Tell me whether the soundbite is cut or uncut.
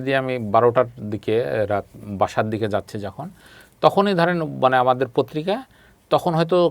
uncut